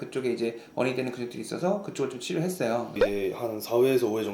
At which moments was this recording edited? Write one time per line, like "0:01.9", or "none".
0:03.0